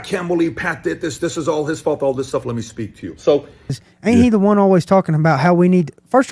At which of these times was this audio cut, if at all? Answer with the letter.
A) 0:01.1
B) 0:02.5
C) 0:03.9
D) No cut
C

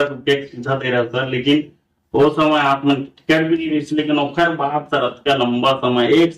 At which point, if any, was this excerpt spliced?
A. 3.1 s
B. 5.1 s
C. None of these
C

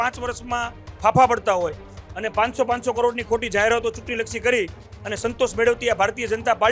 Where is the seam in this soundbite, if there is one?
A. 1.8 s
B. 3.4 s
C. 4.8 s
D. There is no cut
D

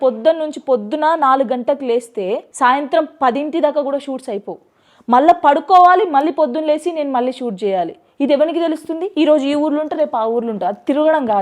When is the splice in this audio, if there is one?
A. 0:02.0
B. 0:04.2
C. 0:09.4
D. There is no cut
D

